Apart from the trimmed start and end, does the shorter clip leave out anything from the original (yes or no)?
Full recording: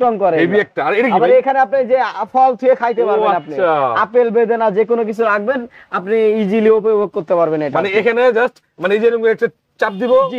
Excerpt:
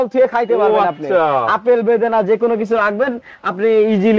no